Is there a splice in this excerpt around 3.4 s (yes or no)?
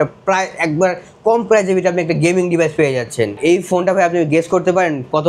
yes